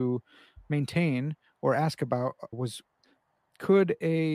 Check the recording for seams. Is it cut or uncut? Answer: cut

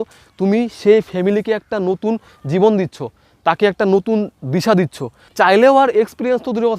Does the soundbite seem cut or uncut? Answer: cut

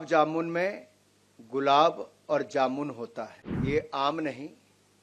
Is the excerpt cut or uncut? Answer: cut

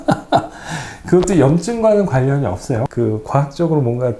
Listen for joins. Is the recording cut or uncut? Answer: cut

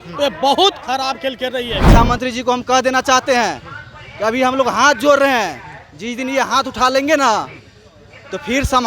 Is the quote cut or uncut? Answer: cut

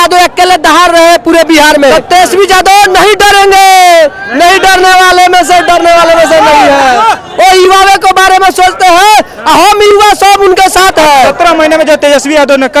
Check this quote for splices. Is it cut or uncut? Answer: cut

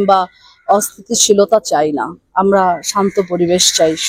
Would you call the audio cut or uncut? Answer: uncut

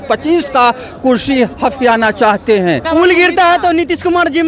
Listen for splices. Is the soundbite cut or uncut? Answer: cut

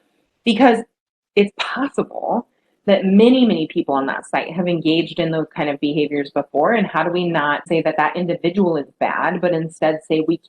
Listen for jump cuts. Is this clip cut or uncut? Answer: cut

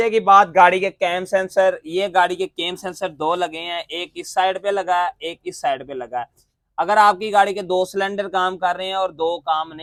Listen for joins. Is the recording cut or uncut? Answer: uncut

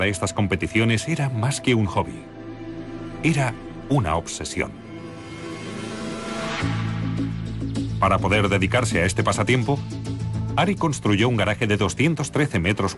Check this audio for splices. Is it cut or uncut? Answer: cut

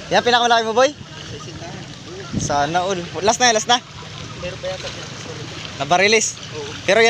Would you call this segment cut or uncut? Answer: uncut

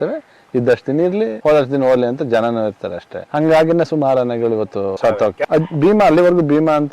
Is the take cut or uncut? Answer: cut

